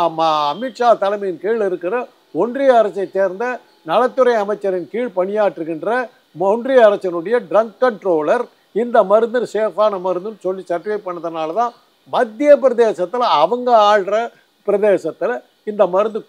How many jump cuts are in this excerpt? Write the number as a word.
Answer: zero